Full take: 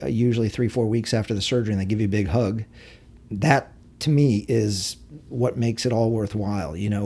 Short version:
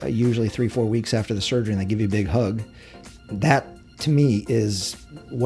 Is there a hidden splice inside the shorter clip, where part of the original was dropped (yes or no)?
no